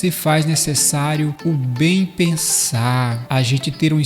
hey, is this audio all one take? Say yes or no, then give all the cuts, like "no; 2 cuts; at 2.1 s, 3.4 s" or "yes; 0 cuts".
no; 2 cuts; at 1.4 s, 3.2 s